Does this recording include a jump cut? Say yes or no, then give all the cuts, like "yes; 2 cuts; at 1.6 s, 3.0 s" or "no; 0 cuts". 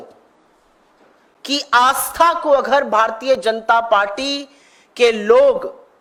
no; 0 cuts